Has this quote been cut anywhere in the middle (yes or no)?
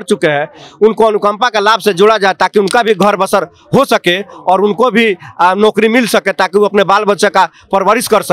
no